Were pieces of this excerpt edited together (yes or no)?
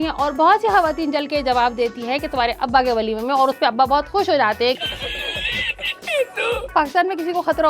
yes